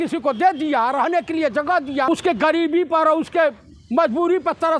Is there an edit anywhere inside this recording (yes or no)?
yes